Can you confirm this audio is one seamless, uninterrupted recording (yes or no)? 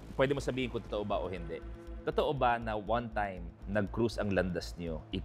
yes